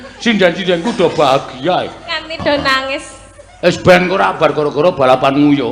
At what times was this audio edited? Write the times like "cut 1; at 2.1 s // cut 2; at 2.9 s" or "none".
none

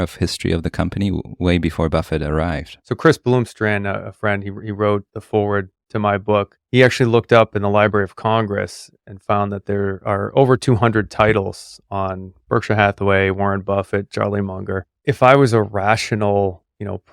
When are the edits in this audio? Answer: cut 1; at 2.7 s

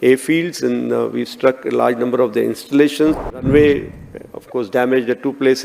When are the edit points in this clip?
cut 1; at 3.2 s

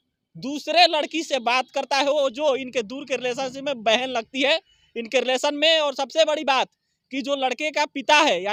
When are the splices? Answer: none

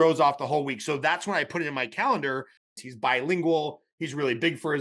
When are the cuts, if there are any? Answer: cut 1; at 2.7 s

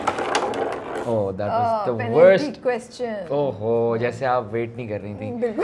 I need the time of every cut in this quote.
none

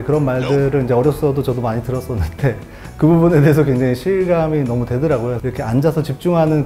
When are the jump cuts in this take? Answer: cut 1; at 5.4 s

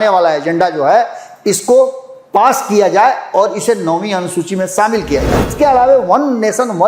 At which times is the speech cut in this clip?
cut 1; at 5.5 s

